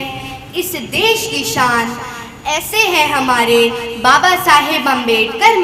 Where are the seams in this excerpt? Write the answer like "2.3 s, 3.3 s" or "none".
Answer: none